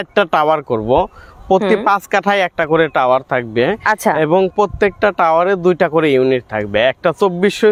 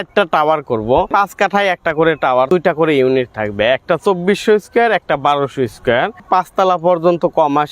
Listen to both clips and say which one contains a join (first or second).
second